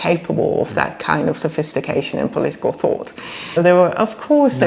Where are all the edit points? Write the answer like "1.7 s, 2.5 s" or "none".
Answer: 3.6 s